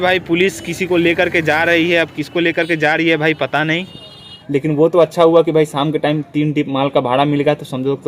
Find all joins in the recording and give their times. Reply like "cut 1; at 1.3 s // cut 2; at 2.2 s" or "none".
cut 1; at 4.3 s